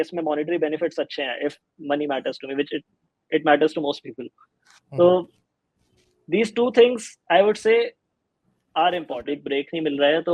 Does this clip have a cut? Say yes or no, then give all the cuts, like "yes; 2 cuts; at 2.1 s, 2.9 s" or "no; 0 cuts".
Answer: yes; 1 cut; at 9.4 s